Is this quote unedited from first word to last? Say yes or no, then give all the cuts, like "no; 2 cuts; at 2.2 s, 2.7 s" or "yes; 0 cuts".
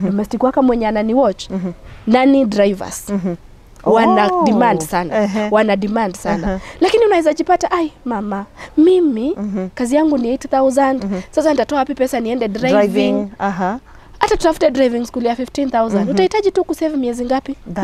yes; 0 cuts